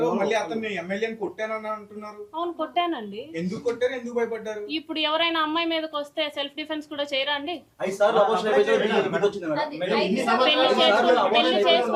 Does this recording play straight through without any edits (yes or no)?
yes